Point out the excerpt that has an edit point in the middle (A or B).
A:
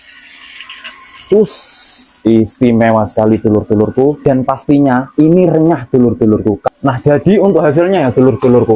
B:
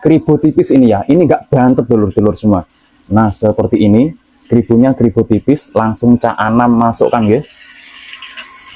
A